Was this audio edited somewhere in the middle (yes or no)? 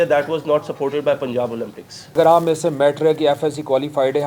yes